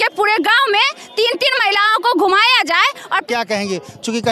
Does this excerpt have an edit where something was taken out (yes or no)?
no